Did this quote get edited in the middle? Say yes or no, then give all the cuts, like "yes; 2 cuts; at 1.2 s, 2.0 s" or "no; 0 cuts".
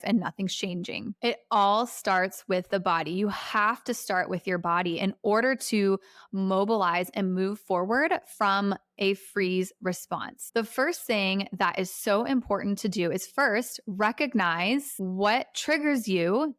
yes; 1 cut; at 14.9 s